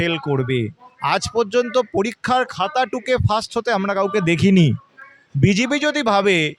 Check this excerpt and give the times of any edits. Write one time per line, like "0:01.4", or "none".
none